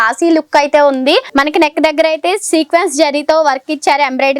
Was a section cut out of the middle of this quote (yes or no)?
yes